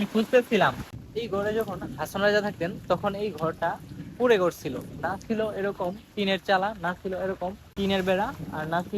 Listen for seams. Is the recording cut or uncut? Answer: cut